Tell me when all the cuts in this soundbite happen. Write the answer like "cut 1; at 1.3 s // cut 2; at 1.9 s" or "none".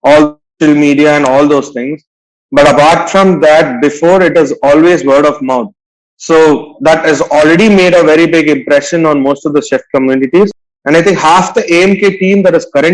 cut 1; at 10.7 s